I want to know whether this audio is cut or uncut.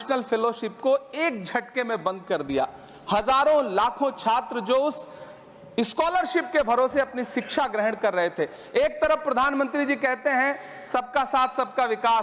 uncut